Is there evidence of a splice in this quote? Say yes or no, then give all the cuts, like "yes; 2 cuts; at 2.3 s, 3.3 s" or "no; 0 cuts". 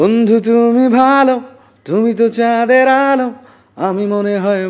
no; 0 cuts